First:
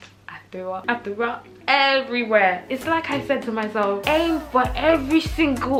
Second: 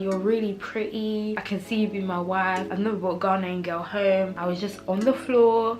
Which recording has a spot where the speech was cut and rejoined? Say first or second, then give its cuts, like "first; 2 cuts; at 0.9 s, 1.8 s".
second; 3 cuts; at 1.4 s, 2.7 s, 4.4 s